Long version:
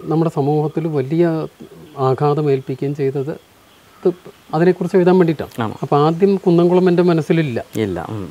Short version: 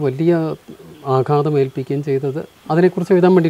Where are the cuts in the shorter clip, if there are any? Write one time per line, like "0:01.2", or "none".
0:02.5